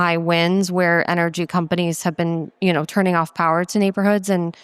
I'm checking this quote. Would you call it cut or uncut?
uncut